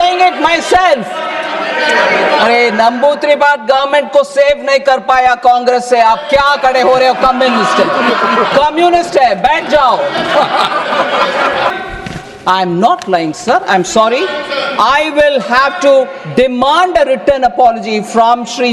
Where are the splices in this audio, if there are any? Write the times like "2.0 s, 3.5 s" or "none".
11.7 s